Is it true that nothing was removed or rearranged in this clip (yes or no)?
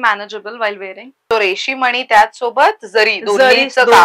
no